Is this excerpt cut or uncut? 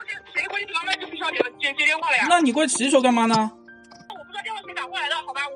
uncut